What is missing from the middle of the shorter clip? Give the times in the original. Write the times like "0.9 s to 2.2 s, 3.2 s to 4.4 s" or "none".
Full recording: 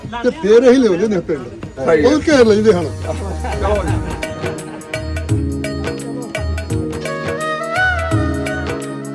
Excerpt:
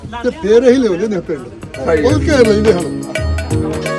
2.9 s to 6.1 s